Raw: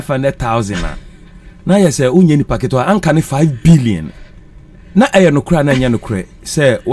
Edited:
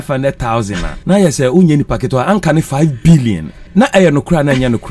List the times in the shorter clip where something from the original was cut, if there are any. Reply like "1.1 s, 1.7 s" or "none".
0.9 s, 3.5 s